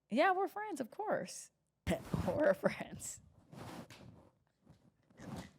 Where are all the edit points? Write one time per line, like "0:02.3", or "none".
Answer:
0:01.8